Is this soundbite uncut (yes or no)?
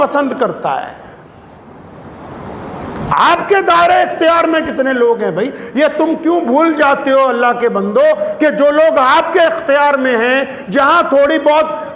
yes